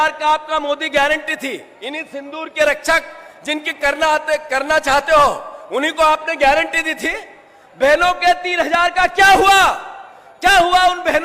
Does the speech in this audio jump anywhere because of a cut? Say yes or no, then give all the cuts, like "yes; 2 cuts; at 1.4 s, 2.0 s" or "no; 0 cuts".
no; 0 cuts